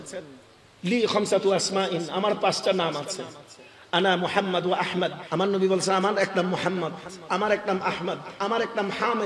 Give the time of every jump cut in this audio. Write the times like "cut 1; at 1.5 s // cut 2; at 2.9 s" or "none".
cut 1; at 5.2 s